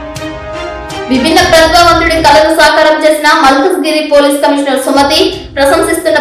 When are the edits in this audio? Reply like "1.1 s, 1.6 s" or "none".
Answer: 1.1 s